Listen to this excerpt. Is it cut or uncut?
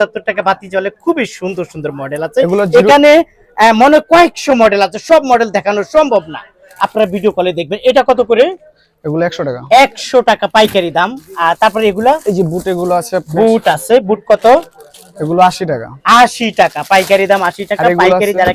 uncut